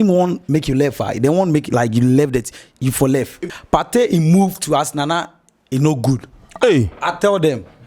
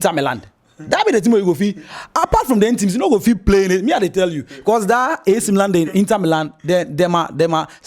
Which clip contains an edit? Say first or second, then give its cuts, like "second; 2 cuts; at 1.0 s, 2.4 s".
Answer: first; 1 cut; at 3.4 s